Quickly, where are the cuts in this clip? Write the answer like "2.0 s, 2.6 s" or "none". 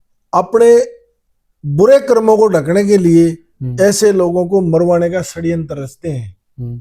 none